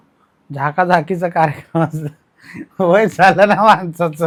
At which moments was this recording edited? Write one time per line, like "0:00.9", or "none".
none